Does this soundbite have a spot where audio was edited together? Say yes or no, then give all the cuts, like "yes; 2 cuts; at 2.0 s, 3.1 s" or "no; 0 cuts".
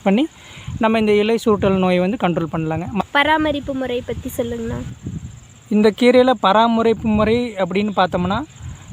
yes; 1 cut; at 3.0 s